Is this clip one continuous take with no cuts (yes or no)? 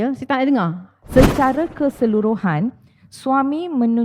no